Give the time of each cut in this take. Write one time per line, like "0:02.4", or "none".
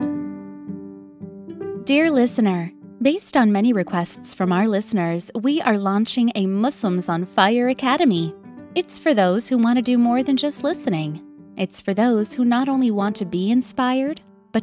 0:01.8